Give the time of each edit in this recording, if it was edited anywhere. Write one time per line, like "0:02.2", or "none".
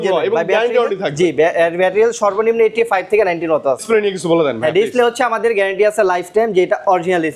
0:03.8